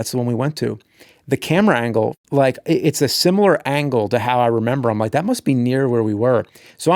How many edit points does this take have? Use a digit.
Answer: 1